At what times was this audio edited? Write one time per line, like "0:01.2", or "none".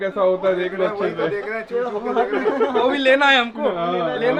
none